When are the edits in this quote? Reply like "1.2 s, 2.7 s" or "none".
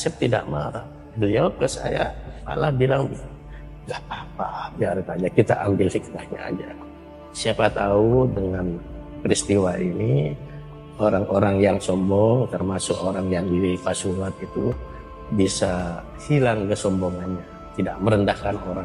none